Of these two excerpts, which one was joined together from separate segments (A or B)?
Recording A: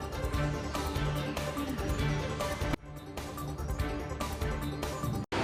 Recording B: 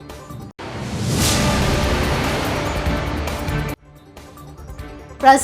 B